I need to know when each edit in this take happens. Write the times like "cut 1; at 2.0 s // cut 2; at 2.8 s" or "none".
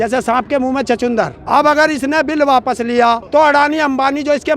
cut 1; at 1.4 s // cut 2; at 3.2 s